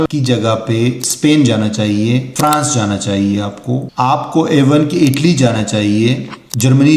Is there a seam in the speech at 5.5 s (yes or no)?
no